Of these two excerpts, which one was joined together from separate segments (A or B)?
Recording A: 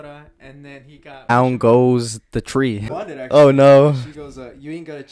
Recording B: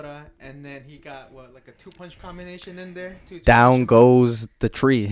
A